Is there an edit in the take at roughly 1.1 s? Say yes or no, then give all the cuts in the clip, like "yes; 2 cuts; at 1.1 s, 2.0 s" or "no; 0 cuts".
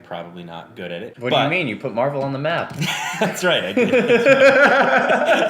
yes; 1 cut; at 1.1 s